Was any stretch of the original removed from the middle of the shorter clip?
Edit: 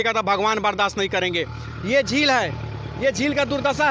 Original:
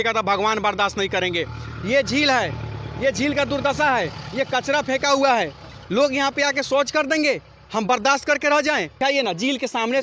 no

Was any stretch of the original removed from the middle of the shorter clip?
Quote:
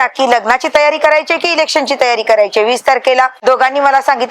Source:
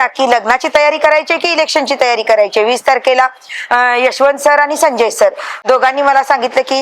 yes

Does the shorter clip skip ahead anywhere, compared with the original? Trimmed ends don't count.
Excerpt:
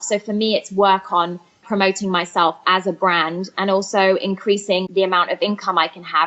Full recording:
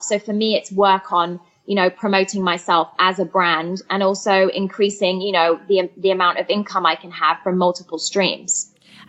yes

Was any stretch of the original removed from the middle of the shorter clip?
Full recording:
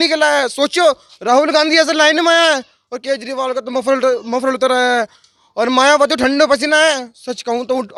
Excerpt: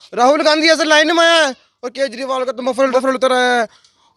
yes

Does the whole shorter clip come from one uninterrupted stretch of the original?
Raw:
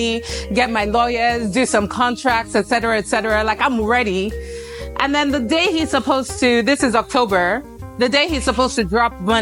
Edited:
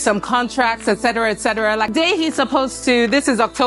no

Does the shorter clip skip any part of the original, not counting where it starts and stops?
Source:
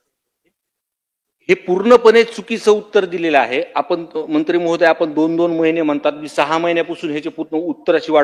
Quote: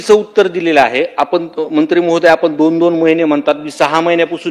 no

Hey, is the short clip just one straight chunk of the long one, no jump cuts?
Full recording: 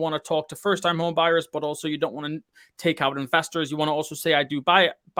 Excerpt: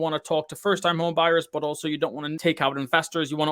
no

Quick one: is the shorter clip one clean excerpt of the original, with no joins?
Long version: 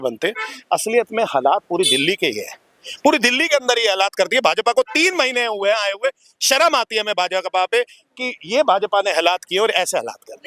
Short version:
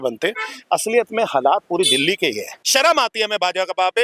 no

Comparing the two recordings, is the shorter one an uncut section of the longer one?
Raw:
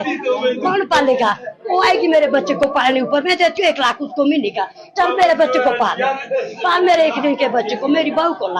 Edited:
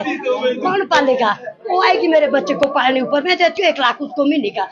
yes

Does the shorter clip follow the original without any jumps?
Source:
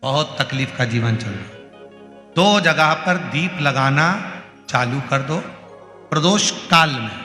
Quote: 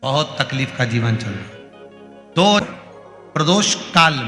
no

